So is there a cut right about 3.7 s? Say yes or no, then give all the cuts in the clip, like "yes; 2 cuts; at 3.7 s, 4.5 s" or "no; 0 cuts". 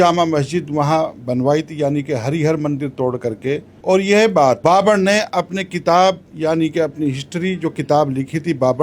yes; 2 cuts; at 3.7 s, 4.6 s